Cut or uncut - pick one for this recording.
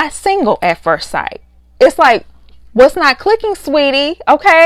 uncut